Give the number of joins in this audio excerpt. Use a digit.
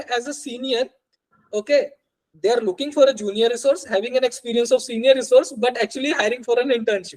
0